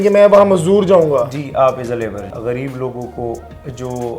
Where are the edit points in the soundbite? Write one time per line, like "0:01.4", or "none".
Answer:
0:02.2